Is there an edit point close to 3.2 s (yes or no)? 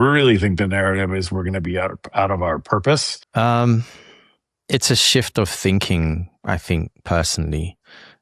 yes